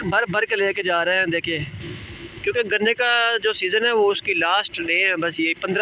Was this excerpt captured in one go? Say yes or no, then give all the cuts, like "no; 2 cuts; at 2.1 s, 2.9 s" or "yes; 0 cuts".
yes; 0 cuts